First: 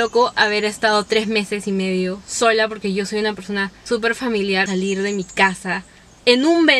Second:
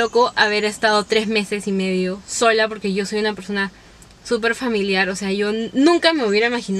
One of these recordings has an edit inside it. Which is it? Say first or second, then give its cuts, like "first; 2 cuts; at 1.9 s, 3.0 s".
first; 2 cuts; at 3.7 s, 4.6 s